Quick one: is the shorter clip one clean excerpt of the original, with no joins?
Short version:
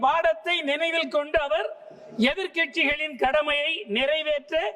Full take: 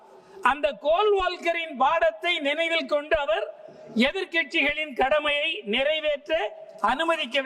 yes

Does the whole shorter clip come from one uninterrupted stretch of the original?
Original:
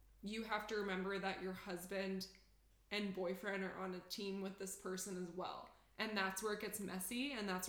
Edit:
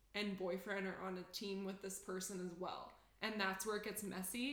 yes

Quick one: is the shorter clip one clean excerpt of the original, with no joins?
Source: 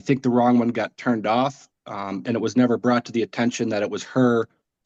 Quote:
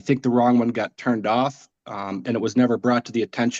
yes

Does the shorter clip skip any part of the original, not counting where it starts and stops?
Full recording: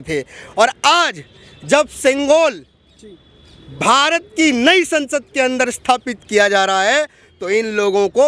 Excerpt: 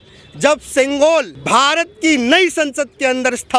yes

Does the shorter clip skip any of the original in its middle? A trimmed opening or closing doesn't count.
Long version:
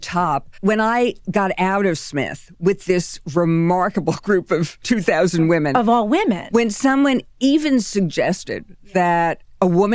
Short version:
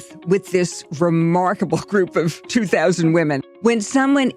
yes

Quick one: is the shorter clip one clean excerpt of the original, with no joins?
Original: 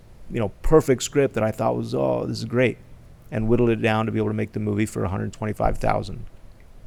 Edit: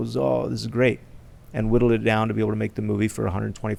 yes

